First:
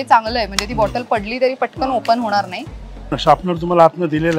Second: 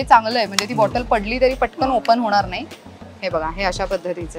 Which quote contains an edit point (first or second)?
first